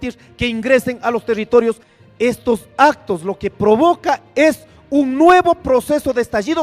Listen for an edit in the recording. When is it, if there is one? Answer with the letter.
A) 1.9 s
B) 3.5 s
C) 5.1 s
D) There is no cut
A